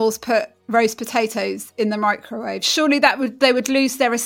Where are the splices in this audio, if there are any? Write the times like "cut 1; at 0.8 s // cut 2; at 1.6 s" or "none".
none